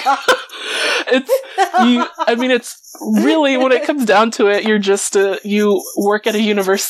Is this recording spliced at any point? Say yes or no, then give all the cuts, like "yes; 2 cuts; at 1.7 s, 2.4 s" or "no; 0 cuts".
no; 0 cuts